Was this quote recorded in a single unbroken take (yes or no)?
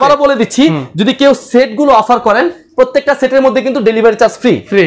yes